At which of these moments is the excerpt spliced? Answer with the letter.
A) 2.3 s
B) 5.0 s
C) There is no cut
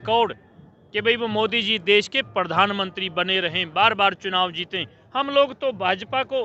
B